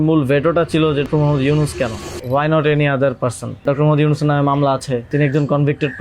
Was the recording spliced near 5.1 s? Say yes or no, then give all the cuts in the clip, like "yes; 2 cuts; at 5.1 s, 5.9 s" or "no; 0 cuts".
yes; 4 cuts; at 1.0 s, 2.1 s, 3.6 s, 5.1 s